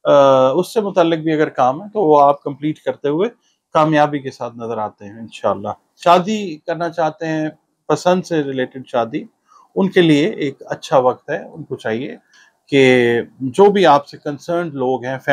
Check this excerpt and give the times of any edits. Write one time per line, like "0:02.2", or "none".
0:06.0